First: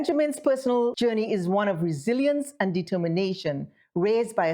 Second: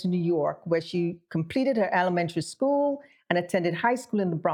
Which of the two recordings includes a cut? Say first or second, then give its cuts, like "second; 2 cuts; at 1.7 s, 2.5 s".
first; 1 cut; at 1.0 s